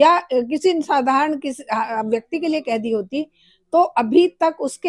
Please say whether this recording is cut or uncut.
uncut